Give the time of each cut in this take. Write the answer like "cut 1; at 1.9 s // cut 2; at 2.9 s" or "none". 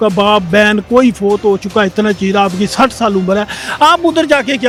none